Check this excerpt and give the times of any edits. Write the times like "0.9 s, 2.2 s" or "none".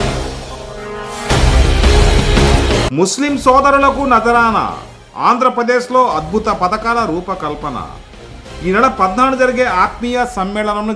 2.9 s

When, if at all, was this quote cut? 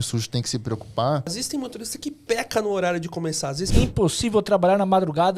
1.4 s, 3.6 s

